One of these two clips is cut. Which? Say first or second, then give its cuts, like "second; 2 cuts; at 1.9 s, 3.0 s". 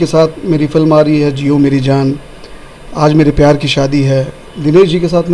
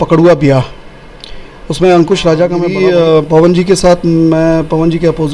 second; 1 cut; at 2.7 s